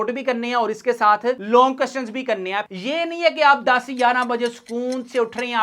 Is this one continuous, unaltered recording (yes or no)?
no